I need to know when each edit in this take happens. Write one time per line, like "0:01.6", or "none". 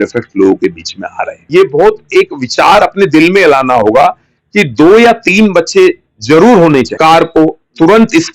0:01.4
0:06.9